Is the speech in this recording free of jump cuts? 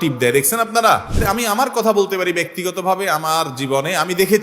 no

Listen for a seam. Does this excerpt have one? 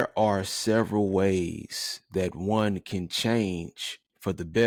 no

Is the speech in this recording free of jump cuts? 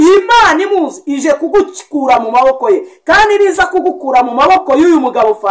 yes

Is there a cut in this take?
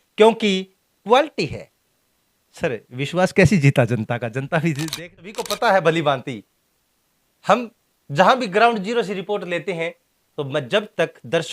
yes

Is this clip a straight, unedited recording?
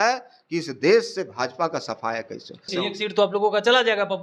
no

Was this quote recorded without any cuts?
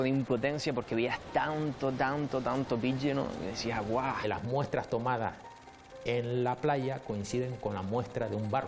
no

